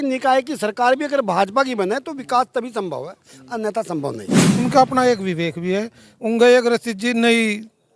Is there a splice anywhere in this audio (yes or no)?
yes